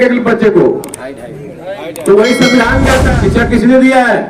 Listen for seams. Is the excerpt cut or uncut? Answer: cut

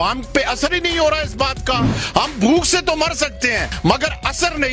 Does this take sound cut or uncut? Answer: uncut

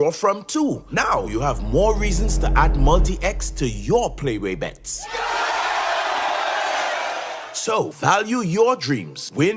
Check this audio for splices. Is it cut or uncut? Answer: uncut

